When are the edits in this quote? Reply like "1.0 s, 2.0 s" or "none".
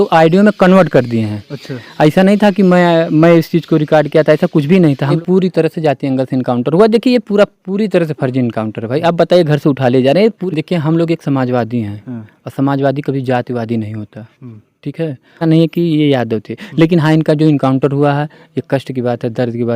5.2 s, 10.4 s, 15.4 s